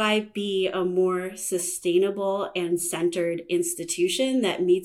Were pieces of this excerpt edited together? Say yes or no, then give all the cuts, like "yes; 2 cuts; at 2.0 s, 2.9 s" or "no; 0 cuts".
no; 0 cuts